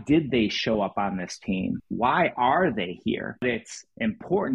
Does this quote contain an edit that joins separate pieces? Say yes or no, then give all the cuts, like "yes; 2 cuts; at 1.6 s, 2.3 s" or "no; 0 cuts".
yes; 1 cut; at 3.4 s